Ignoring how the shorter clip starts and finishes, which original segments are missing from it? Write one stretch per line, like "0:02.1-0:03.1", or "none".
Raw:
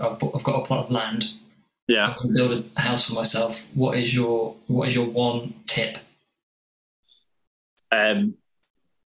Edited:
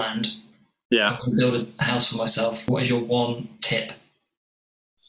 0:03.6-0:04.7